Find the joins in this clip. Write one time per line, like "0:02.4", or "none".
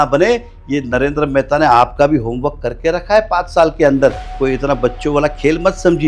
none